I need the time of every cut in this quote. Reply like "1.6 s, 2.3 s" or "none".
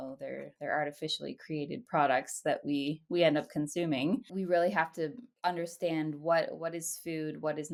none

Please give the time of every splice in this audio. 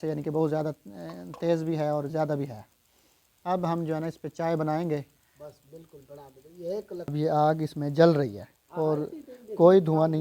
7.1 s

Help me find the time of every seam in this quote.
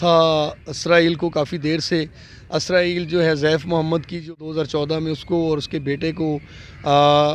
4.4 s

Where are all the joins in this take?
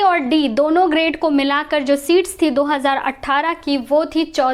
none

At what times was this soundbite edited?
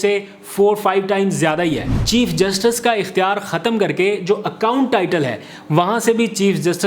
1.9 s

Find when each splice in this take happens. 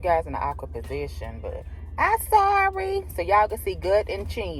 1.8 s

